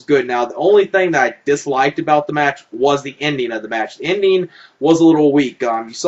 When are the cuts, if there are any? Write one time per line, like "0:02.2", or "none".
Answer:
0:04.0